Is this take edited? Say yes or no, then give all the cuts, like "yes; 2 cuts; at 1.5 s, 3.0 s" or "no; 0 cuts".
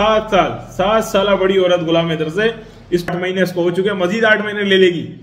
yes; 1 cut; at 3.1 s